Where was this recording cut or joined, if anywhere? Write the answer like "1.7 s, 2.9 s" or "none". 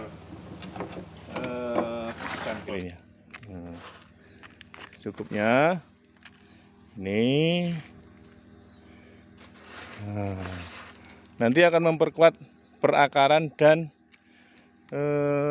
2.7 s

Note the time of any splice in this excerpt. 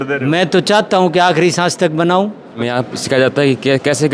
2.7 s

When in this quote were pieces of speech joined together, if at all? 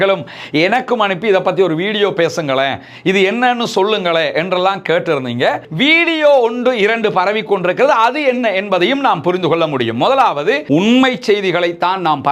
5.7 s, 10.6 s

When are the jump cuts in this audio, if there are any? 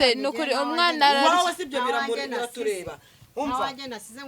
none

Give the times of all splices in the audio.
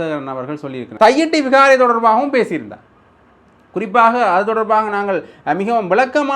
0.9 s

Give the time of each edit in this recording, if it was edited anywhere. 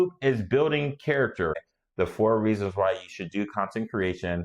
1.8 s

